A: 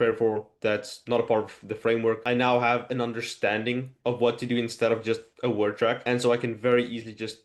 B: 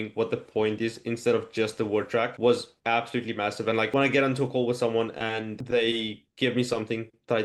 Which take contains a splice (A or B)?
B